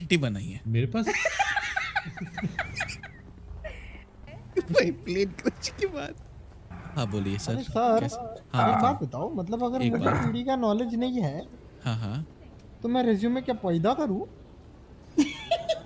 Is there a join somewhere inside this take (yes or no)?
no